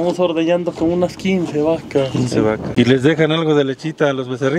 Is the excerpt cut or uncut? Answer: cut